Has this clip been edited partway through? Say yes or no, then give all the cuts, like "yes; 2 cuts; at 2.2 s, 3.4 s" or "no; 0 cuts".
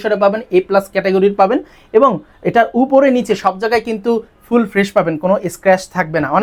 no; 0 cuts